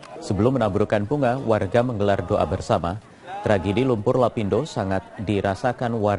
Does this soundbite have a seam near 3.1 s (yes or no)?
no